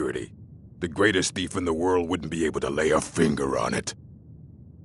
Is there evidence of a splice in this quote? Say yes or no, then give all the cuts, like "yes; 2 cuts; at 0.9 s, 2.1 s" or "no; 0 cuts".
yes; 1 cut; at 3.9 s